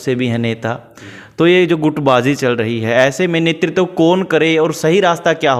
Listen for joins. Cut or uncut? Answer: uncut